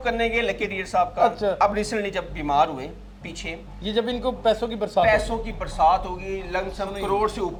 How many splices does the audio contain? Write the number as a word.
zero